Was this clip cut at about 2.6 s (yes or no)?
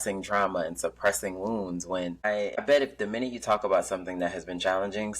yes